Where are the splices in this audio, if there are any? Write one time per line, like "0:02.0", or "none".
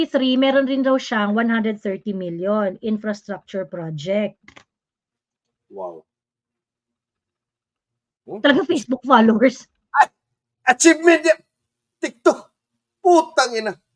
none